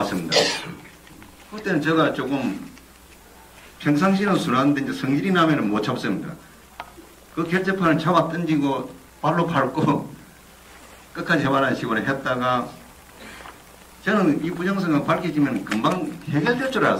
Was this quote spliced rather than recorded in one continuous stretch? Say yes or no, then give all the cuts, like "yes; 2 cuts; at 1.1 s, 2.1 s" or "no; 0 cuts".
no; 0 cuts